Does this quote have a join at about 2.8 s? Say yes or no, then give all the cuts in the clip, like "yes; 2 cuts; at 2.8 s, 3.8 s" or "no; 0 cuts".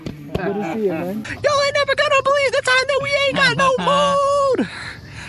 no; 1 cut; at 1.3 s